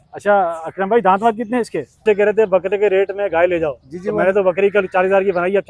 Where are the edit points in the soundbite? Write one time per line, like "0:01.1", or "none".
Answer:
0:02.0